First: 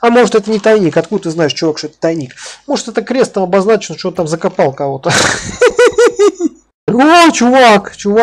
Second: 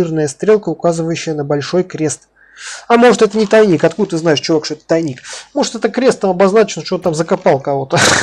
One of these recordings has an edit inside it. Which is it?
first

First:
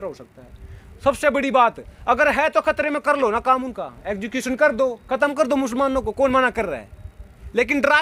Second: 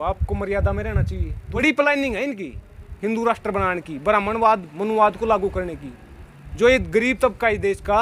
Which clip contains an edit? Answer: second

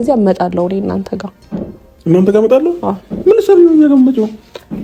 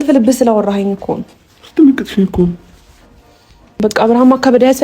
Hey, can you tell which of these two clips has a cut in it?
second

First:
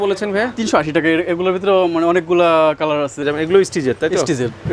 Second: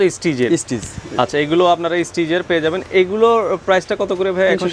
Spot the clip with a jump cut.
first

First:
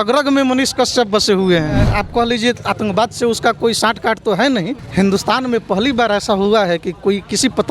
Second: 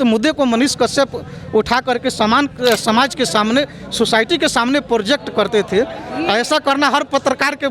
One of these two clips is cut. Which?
first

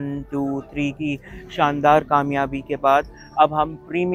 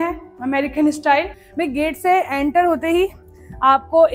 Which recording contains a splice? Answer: second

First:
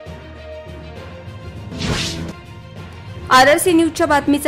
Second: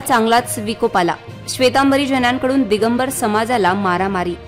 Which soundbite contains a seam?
first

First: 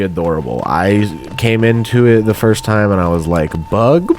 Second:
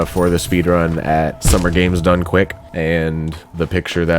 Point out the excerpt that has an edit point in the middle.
second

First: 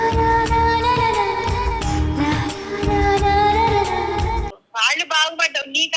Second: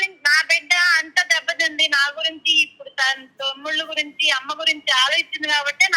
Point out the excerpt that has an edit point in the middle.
first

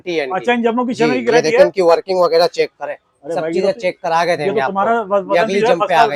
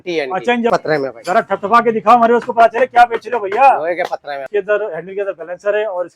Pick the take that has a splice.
second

